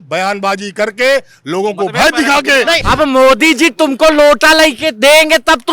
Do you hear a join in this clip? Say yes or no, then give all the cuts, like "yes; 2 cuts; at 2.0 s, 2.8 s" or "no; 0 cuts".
yes; 1 cut; at 2.8 s